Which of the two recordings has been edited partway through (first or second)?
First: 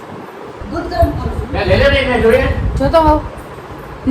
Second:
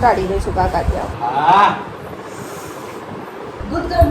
second